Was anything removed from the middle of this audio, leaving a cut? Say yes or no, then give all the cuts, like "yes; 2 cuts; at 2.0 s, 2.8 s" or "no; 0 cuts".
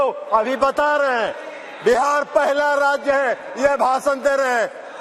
no; 0 cuts